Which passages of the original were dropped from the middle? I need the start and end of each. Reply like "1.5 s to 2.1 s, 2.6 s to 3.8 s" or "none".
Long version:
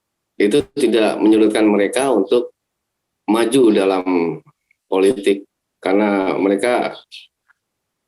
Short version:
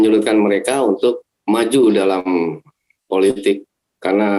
2.6 s to 3.1 s